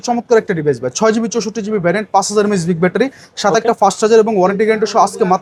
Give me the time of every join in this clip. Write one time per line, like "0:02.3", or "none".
none